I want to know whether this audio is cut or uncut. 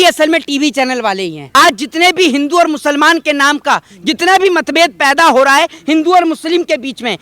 cut